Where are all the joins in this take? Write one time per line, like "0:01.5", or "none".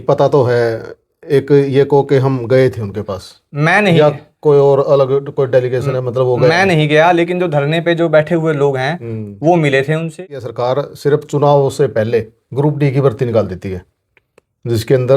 0:10.2